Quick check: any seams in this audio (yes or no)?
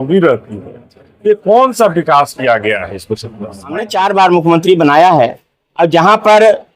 yes